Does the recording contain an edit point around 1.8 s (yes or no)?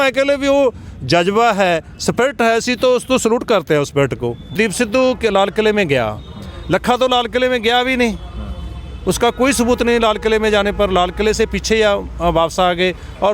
no